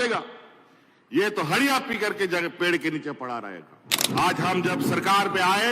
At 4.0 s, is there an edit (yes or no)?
yes